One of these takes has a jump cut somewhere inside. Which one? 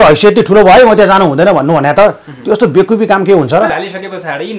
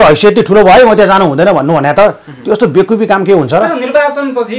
first; 1 cut; at 3.7 s

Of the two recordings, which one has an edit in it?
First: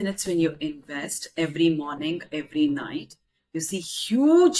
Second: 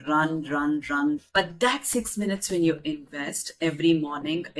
second; 1 cut; at 1.2 s

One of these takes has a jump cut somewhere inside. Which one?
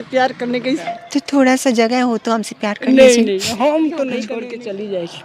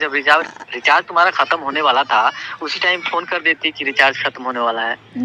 first; 2 cuts; at 0.8 s, 4.3 s

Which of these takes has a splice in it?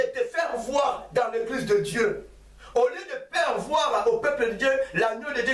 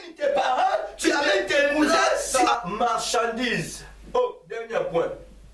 second; 1 cut; at 2.3 s

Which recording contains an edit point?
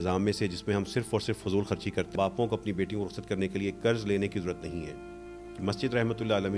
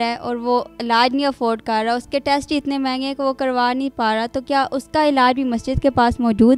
first; 1 cut; at 2.1 s

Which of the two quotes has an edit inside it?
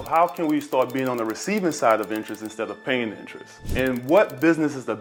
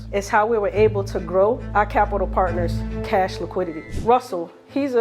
second; 1 cut; at 1.6 s

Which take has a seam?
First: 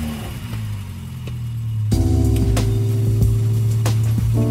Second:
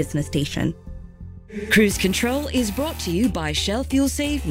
second; 1 cut; at 0.9 s

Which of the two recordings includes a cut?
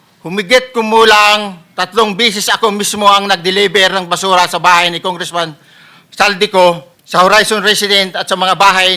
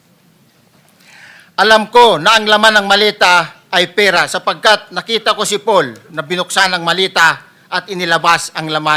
first; 1 cut; at 6.9 s

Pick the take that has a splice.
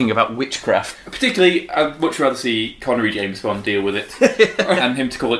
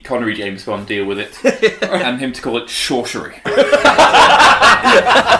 first; 1 cut; at 0.9 s

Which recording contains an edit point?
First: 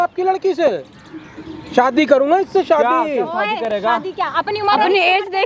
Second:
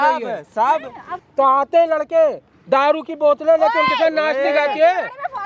second; 1 cut; at 1.2 s

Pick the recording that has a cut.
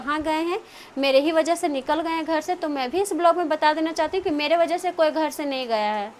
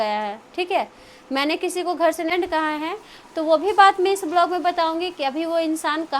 second; 1 cut; at 2.3 s

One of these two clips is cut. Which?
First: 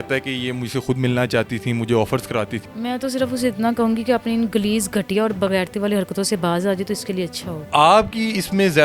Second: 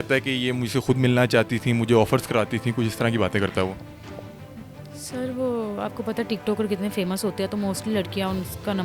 first; 2 cuts; at 2.6 s, 7.7 s

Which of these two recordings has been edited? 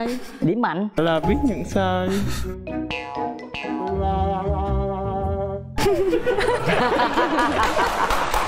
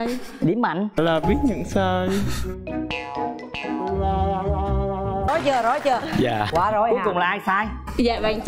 second; 1 cut; at 5.3 s

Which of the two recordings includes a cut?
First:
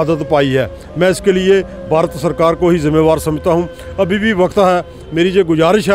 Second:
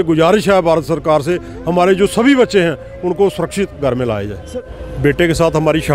second; 1 cut; at 4.5 s

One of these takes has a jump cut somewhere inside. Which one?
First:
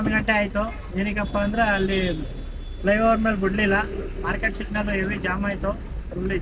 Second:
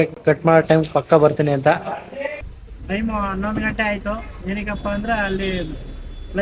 second; 1 cut; at 2.4 s

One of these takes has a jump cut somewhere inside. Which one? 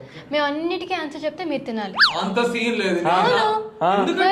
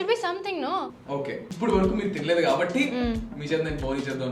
second; 1 cut; at 1.5 s

